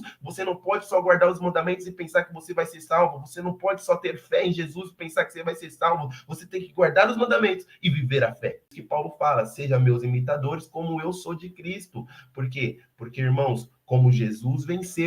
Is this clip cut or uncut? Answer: cut